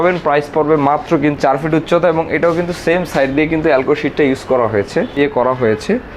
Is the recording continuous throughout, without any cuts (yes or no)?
no